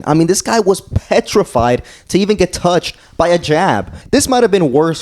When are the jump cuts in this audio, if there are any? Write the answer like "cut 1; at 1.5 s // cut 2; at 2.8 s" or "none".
cut 1; at 3.9 s